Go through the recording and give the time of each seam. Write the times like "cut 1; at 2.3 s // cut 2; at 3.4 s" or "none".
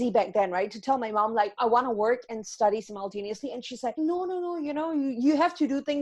cut 1; at 1.6 s // cut 2; at 4.0 s